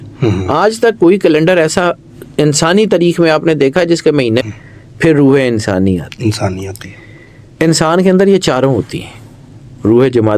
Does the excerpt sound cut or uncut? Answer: cut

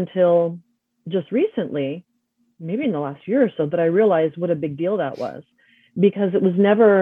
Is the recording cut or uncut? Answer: uncut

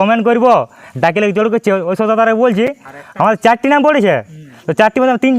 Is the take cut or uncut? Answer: uncut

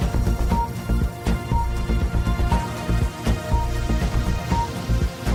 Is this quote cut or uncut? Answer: uncut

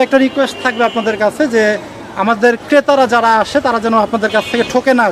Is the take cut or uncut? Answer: uncut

